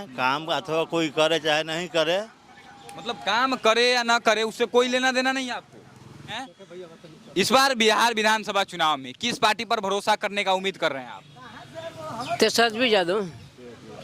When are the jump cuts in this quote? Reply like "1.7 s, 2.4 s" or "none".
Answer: 6.4 s